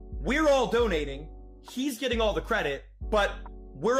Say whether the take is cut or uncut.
uncut